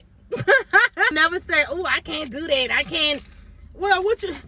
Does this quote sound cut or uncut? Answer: cut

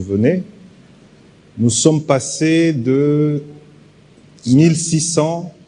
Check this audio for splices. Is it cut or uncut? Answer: uncut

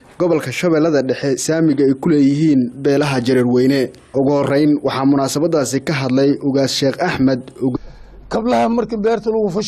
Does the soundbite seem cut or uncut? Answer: uncut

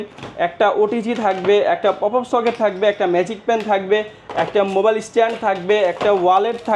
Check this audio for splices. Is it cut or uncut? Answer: uncut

